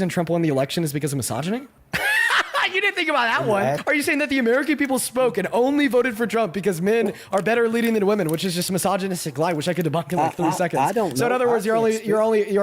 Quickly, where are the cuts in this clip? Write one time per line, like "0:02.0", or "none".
0:01.8
0:03.8